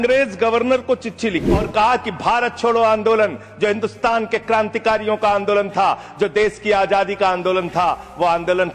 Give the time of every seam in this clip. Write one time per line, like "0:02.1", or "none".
0:01.7